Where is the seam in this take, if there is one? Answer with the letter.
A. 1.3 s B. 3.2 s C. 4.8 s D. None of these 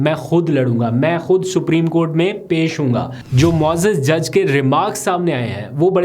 B